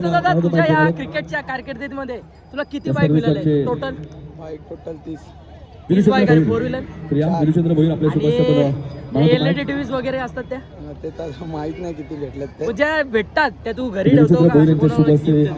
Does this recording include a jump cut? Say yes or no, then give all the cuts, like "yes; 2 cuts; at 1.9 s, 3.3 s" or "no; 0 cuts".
no; 0 cuts